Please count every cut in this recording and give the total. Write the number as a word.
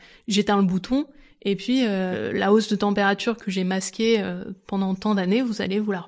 one